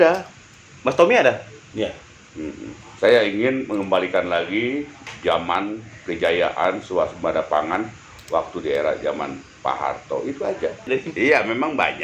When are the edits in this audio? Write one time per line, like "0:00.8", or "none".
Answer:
0:01.5
0:10.9